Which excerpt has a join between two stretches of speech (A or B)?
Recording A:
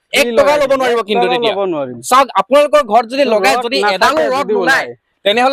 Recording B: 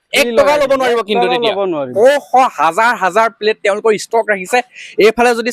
B